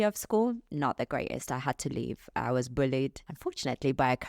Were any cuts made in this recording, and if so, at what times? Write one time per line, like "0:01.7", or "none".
0:03.3